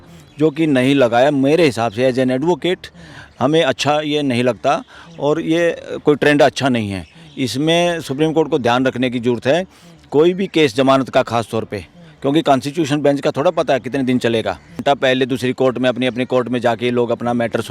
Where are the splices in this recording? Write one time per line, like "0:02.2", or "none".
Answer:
0:14.8